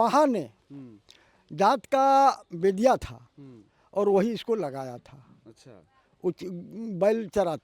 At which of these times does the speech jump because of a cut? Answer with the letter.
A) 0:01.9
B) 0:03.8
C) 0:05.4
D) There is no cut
D